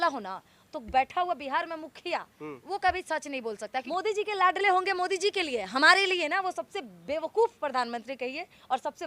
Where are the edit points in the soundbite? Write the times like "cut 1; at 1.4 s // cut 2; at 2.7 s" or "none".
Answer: cut 1; at 3.9 s